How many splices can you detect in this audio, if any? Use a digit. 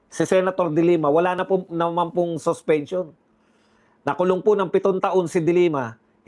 0